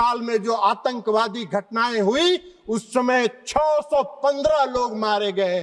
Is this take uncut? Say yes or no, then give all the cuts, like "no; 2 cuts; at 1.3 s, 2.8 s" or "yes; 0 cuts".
yes; 0 cuts